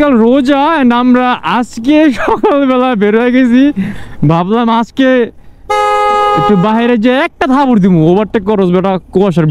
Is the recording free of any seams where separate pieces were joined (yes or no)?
yes